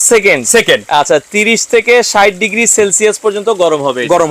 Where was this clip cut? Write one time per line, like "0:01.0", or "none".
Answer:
none